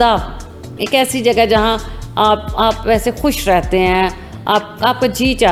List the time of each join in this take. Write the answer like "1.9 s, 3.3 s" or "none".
none